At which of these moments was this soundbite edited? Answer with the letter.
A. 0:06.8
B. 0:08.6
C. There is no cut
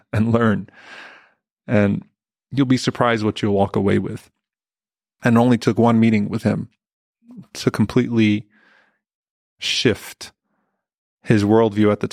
A